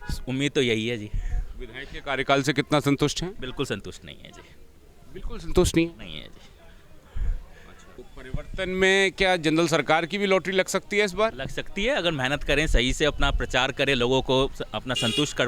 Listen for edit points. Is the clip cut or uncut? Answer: cut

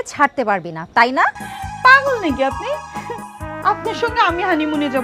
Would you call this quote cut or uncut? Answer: cut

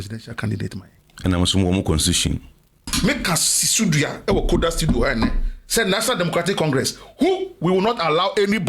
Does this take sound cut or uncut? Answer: cut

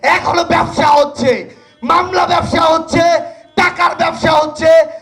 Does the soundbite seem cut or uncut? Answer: uncut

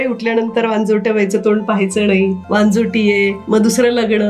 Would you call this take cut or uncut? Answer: cut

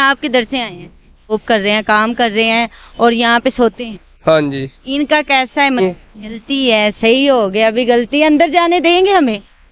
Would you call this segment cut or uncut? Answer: cut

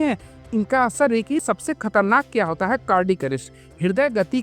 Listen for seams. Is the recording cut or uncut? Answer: cut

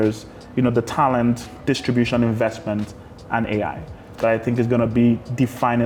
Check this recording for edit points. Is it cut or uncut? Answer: uncut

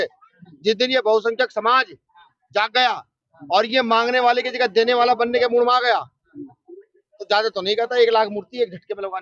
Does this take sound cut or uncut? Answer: uncut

